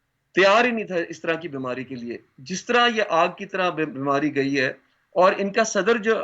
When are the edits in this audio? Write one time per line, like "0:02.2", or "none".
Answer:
none